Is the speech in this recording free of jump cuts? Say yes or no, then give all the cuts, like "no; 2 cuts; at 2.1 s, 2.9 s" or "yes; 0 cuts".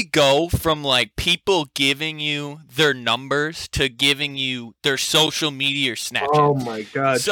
yes; 0 cuts